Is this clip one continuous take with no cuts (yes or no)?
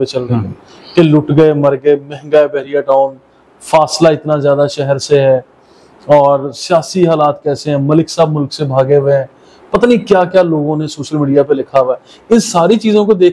yes